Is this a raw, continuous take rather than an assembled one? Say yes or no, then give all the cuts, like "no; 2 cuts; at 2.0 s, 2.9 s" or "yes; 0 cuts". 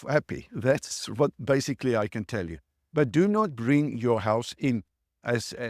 no; 1 cut; at 2.1 s